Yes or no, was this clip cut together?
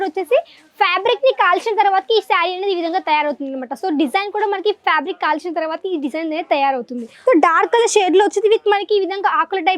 yes